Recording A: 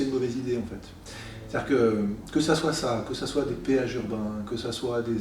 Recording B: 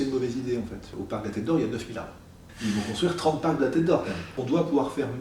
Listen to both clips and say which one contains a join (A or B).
B